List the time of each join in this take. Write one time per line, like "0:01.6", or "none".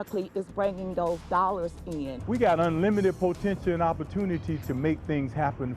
0:02.2